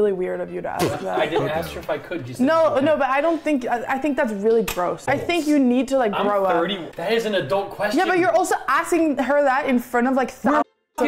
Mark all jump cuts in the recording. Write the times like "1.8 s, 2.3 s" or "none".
5.0 s, 6.9 s